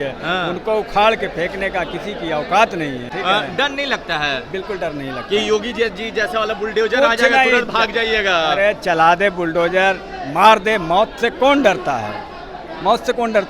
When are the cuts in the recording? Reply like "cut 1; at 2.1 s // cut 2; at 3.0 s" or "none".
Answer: cut 1; at 3.1 s